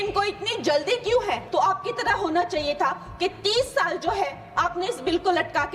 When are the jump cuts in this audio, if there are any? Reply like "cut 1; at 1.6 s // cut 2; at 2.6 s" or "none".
cut 1; at 1.4 s